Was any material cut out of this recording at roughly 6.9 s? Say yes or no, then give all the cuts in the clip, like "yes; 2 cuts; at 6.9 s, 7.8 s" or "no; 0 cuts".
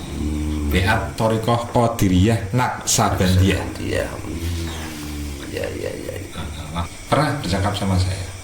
yes; 1 cut; at 6.9 s